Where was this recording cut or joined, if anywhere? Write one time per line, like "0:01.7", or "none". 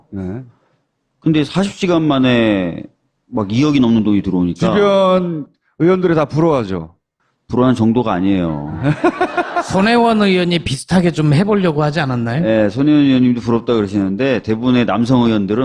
0:02.2